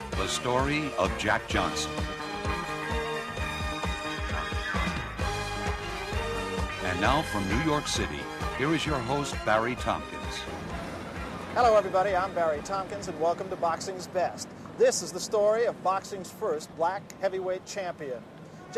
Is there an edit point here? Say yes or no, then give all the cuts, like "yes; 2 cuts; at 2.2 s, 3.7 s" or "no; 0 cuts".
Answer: yes; 1 cut; at 2.7 s